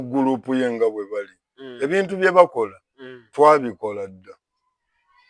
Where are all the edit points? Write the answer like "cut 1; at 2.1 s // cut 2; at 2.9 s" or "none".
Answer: none

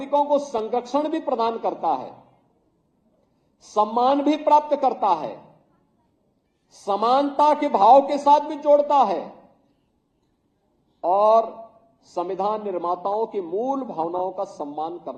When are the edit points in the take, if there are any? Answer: none

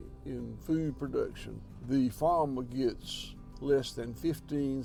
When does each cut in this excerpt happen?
none

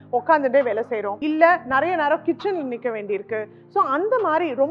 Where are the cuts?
cut 1; at 1.1 s

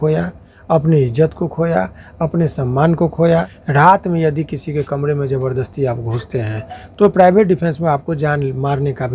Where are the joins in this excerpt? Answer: cut 1; at 3.6 s

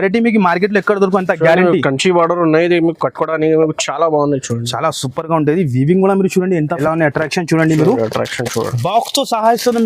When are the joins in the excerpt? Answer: cut 1; at 6.8 s

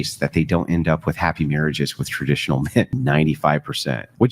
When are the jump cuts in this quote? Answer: cut 1; at 2.9 s

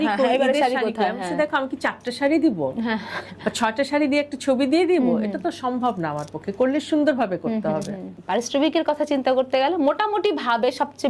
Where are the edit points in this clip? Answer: cut 1; at 8.2 s

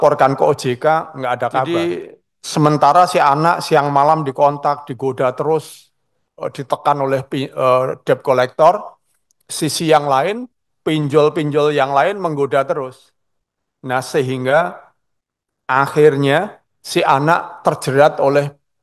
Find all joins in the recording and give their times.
cut 1; at 1.8 s

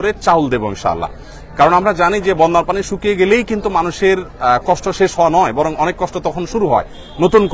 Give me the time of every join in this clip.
none

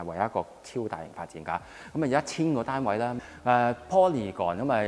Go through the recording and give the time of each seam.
cut 1; at 3.2 s

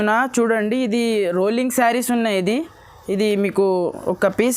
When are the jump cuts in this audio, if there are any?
none

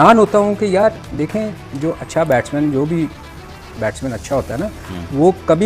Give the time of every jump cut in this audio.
none

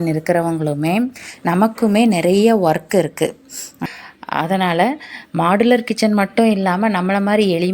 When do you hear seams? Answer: cut 1; at 3.7 s

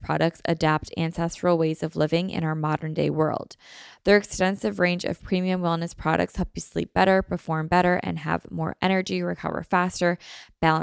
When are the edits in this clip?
none

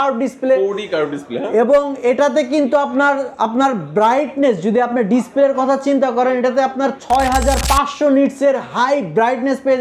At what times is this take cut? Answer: none

